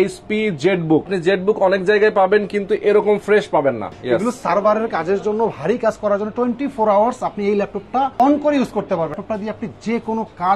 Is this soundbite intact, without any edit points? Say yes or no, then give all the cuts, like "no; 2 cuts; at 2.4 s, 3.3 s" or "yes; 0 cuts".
no; 4 cuts; at 1.1 s, 3.9 s, 8.1 s, 9.1 s